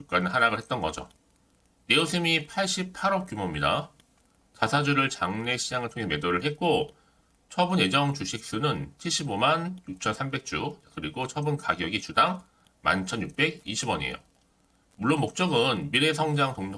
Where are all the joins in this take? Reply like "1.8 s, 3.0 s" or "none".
none